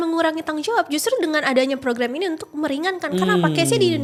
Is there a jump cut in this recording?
no; 0 cuts

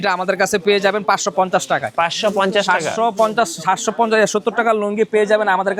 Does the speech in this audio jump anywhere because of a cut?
no; 0 cuts

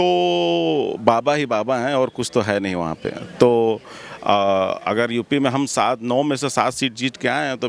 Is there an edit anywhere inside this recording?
no; 0 cuts

